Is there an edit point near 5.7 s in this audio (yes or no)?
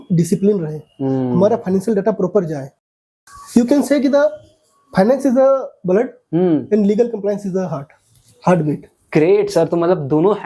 no